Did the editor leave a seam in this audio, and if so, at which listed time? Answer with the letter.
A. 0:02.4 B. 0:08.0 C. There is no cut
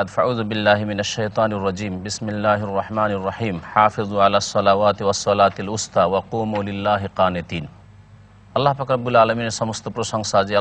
C